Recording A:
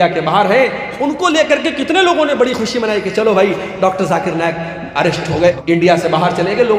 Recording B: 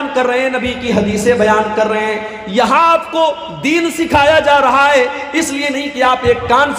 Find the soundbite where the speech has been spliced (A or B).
A